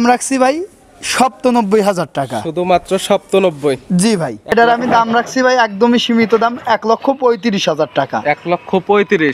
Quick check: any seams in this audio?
yes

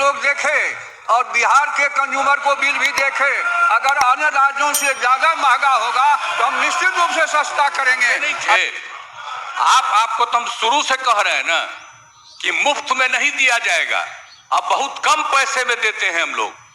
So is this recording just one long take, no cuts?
no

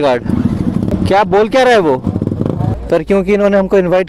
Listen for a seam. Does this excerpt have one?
yes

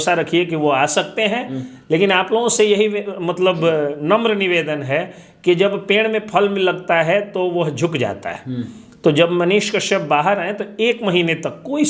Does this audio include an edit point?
no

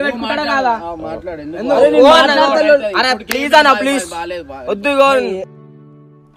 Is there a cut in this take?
no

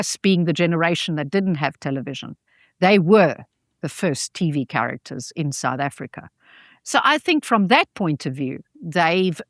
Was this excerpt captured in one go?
yes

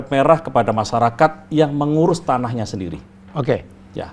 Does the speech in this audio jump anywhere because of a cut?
no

